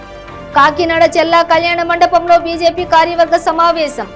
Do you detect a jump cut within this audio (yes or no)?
no